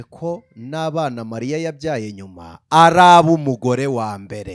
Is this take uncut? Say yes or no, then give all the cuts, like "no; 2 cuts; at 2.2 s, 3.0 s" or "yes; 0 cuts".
yes; 0 cuts